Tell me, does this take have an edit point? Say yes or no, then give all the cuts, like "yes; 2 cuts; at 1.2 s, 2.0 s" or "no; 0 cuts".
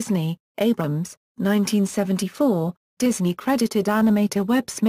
no; 0 cuts